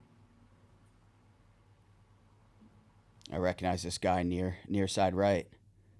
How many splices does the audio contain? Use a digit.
0